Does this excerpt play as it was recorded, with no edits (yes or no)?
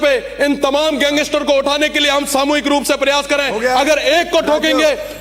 yes